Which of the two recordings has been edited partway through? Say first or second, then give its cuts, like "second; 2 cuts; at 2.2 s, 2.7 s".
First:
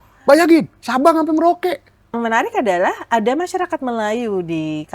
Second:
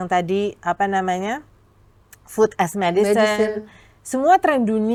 first; 1 cut; at 2.2 s